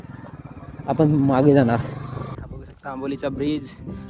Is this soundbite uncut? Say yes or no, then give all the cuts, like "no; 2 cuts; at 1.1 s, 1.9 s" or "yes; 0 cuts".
no; 1 cut; at 2.4 s